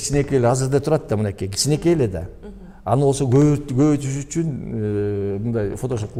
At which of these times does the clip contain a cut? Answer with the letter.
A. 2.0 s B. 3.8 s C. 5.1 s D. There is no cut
D